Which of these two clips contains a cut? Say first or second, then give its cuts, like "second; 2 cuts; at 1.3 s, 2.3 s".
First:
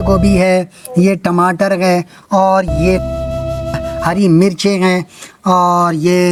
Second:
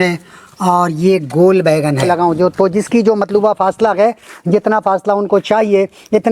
second; 1 cut; at 2.0 s